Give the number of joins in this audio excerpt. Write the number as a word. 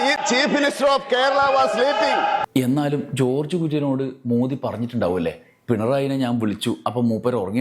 one